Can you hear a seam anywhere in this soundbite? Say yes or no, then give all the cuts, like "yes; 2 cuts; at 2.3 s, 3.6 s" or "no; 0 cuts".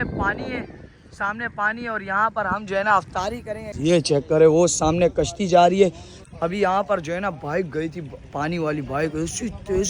yes; 1 cut; at 3.7 s